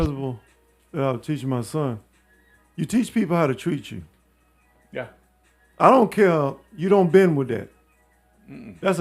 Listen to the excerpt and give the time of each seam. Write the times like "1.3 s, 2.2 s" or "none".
none